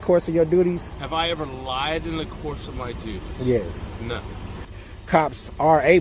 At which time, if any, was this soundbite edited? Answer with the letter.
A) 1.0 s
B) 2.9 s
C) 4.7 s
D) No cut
C